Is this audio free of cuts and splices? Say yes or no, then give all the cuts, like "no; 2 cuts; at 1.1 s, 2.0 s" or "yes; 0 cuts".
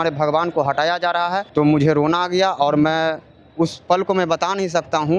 no; 1 cut; at 1.4 s